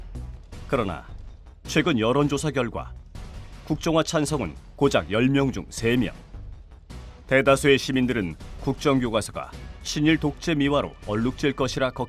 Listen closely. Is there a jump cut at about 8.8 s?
yes; 1 cut; at 8.8 s

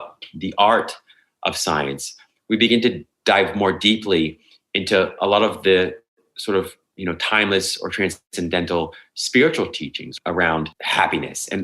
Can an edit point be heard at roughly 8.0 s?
no; 2 cuts; at 10.1 s, 10.8 s

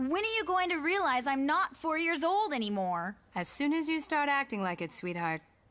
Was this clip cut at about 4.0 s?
yes; 1 cut; at 4.0 s

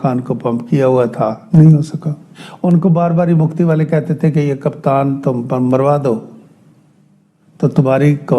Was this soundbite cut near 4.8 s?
no; 1 cut; at 1.4 s

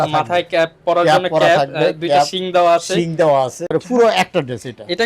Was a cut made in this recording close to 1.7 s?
no; 1 cut; at 3.7 s

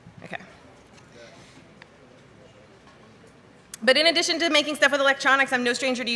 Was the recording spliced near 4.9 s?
yes; 1 cut; at 4.9 s

